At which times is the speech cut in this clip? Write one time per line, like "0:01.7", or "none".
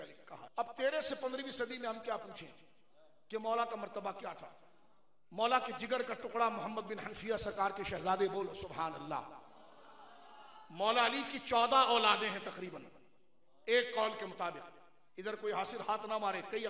none